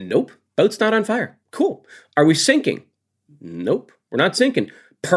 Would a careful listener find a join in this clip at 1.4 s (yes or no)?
yes